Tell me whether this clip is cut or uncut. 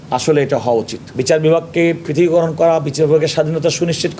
cut